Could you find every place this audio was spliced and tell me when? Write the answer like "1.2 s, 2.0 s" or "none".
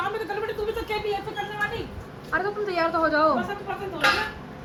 none